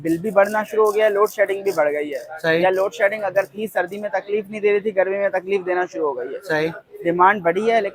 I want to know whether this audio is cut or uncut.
uncut